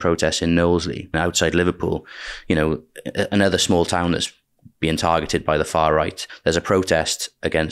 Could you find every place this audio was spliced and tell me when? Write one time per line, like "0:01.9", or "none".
0:01.1
0:06.2